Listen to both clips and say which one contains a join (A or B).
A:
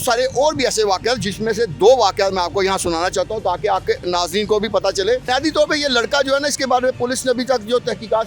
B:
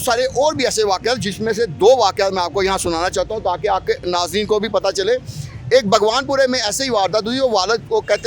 A